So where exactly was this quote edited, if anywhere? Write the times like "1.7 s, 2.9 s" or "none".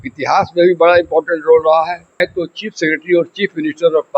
2.1 s